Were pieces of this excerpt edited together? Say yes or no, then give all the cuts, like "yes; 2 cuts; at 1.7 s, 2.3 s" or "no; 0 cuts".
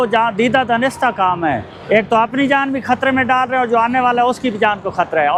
no; 0 cuts